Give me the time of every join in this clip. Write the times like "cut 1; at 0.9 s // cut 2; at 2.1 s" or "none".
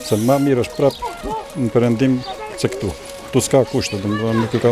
none